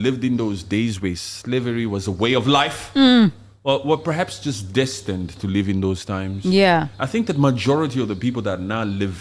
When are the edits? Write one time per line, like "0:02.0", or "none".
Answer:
none